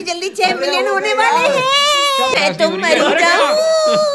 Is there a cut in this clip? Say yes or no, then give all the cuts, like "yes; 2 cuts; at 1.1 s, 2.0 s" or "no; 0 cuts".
yes; 1 cut; at 2.3 s